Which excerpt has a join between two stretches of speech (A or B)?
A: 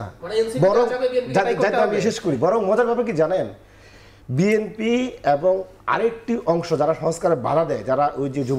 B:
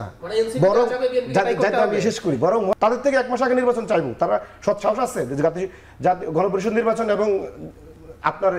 B